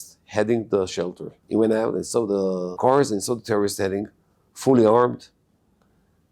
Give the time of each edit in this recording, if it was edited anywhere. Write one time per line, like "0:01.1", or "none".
0:01.3
0:02.8